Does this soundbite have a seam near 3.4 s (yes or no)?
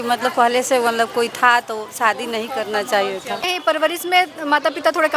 yes